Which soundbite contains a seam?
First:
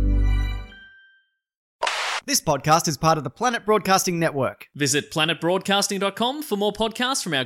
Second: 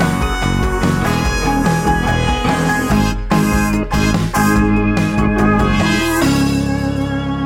first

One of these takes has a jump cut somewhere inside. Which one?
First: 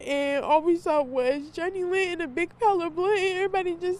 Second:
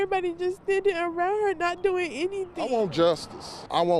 second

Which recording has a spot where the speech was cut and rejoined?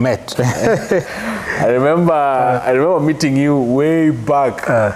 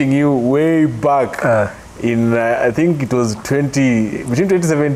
first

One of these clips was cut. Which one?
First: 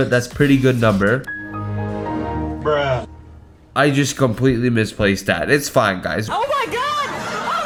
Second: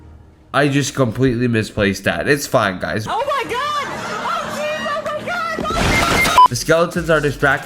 second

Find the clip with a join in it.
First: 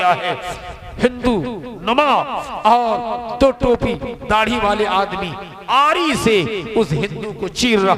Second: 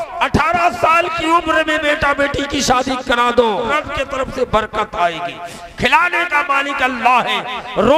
second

